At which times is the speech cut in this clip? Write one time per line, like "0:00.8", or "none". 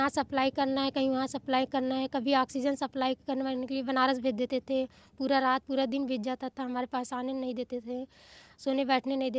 none